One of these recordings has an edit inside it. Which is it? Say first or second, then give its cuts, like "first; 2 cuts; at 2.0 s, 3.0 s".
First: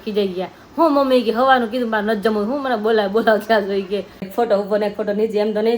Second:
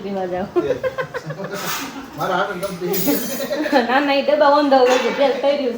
first; 1 cut; at 4.3 s